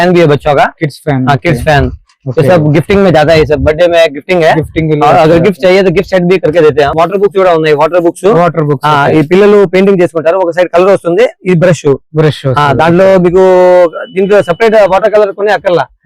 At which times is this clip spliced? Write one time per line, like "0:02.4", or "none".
0:06.9

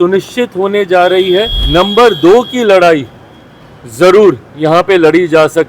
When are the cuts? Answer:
0:01.6

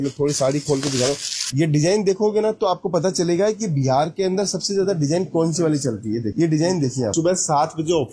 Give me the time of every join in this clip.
0:01.5
0:07.1

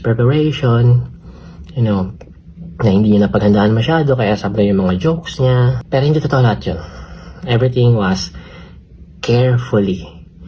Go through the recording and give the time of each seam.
0:05.8

